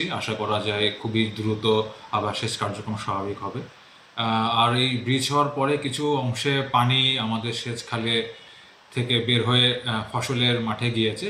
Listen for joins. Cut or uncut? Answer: uncut